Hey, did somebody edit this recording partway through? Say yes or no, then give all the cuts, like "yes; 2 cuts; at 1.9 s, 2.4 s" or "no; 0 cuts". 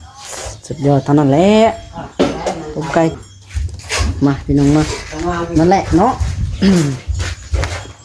yes; 1 cut; at 3.1 s